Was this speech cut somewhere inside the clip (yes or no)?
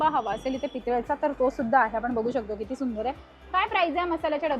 no